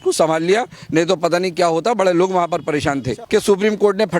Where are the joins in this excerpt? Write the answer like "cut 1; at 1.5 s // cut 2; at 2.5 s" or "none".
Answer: cut 1; at 3.2 s

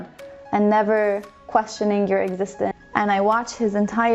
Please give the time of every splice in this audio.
cut 1; at 2.7 s

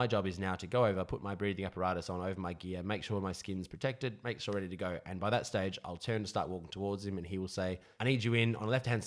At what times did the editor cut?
cut 1; at 7.9 s

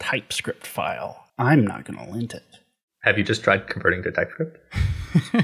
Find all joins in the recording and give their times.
cut 1; at 1.2 s

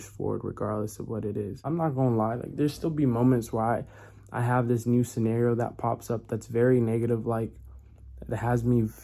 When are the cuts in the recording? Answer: cut 1; at 1.7 s

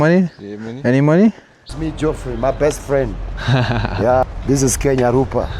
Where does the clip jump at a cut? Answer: cut 1; at 1.7 s // cut 2; at 4.2 s

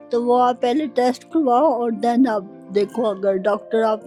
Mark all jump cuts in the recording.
none

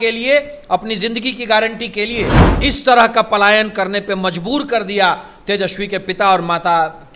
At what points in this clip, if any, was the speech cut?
cut 1; at 2.4 s

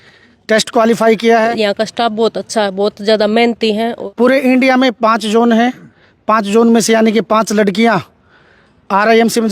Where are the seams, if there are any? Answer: cut 1; at 1.5 s // cut 2; at 3.9 s

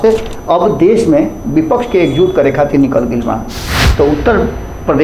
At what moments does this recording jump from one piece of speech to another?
cut 1; at 3.8 s

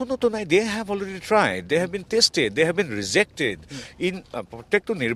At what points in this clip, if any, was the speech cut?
none

